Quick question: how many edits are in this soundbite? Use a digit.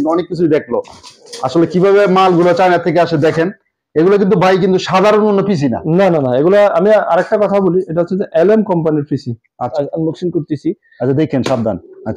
1